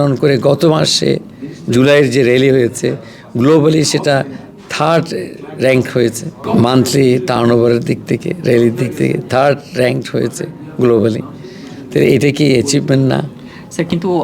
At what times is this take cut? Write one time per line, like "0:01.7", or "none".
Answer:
none